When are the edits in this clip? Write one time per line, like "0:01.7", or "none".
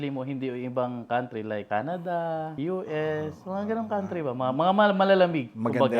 0:01.6
0:02.5